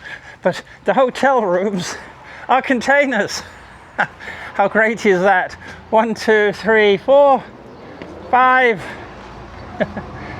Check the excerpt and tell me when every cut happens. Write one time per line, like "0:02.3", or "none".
none